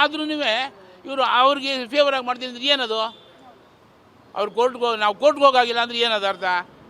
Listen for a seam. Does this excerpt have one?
no; 0 cuts

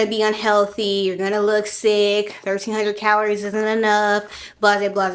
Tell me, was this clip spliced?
no; 0 cuts

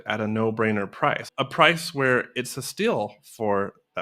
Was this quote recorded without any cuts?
no; 1 cut; at 1.2 s

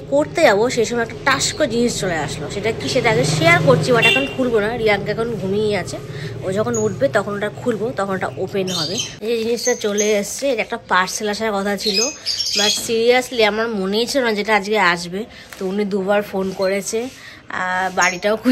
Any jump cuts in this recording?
yes; 1 cut; at 9.1 s

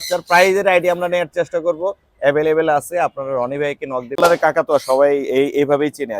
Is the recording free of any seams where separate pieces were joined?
no; 1 cut; at 4.2 s

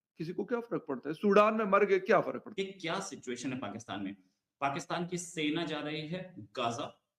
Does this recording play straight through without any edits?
no; 1 cut; at 2.5 s

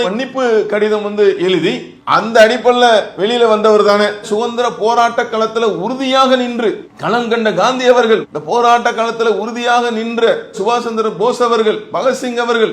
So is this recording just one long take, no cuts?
yes; 0 cuts

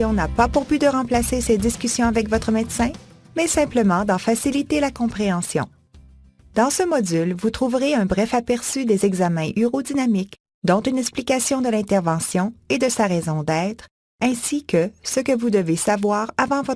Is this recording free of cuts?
yes; 0 cuts

